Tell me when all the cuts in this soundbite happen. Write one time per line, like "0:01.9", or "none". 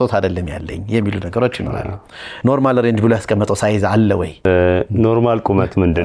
0:02.2
0:04.5